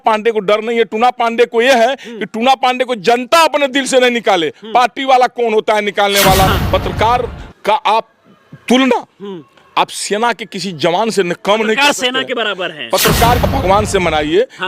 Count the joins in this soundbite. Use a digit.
2